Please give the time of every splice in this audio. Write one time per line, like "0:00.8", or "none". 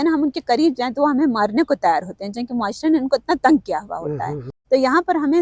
0:04.5